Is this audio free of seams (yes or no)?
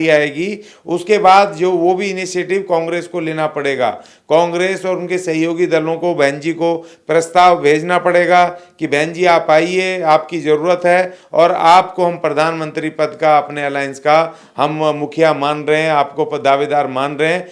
yes